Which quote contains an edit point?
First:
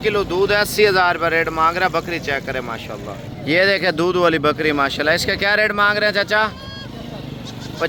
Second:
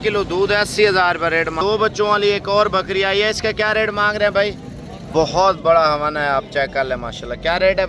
second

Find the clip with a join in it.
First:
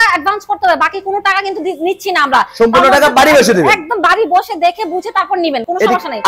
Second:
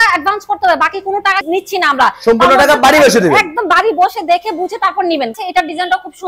second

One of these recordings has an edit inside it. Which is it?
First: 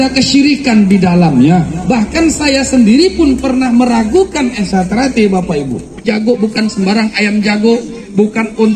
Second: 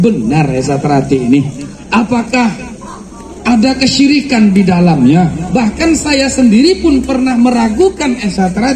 first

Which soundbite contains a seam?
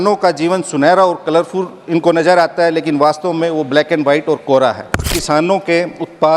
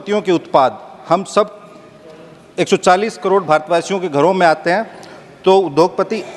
first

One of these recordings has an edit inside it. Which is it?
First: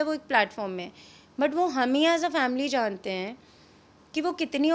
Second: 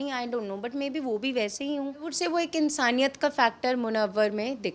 second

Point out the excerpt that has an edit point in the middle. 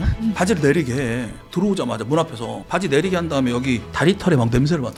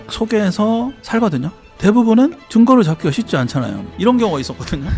second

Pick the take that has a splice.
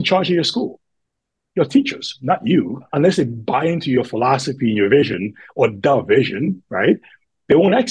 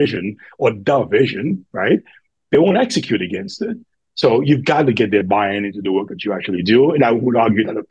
first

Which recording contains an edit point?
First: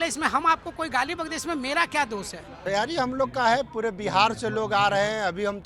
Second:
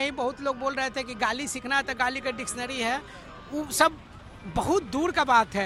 first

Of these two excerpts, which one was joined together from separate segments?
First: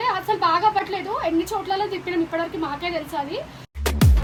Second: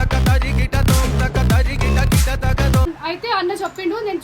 second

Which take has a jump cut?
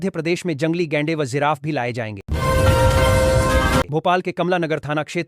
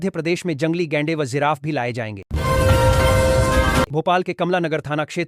first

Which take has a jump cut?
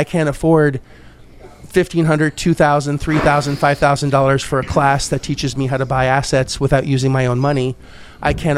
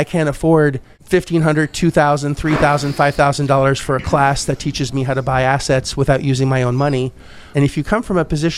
second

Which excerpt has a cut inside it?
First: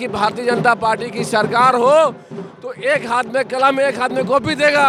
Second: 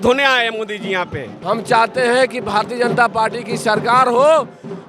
second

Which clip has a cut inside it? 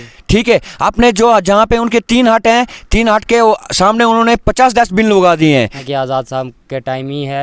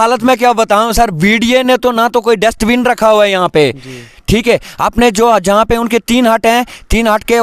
first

